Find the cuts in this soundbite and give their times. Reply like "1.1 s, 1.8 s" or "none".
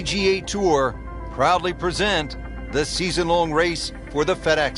none

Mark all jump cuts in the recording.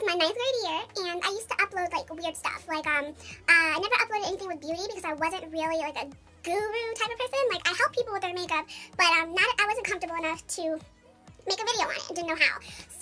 6.9 s

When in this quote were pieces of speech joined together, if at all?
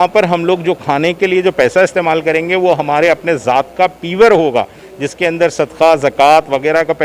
none

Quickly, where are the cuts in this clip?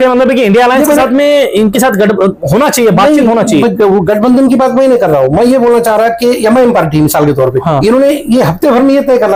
none

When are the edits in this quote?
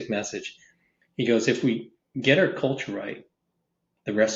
none

